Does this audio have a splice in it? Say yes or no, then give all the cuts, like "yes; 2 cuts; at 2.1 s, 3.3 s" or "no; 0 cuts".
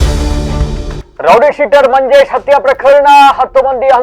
yes; 1 cut; at 1.0 s